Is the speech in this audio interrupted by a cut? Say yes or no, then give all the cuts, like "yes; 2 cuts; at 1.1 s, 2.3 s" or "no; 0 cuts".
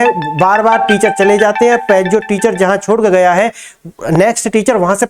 no; 0 cuts